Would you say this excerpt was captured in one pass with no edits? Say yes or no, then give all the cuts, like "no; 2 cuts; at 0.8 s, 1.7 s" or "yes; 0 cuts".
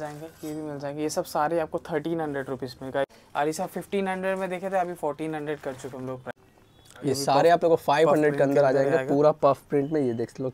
no; 2 cuts; at 3.2 s, 6.3 s